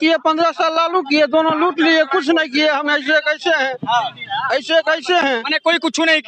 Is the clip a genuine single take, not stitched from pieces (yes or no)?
yes